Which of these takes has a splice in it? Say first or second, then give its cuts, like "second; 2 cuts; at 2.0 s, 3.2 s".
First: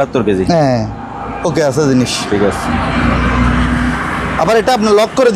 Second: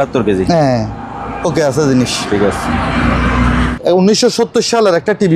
second; 1 cut; at 3.7 s